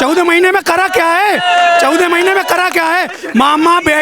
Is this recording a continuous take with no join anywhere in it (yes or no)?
yes